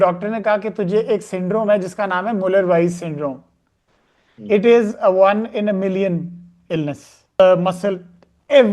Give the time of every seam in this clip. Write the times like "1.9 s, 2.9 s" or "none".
7.2 s